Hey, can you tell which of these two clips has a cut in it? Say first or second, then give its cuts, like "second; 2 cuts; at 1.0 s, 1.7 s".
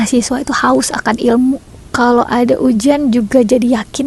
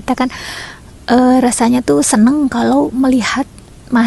first; 1 cut; at 1.8 s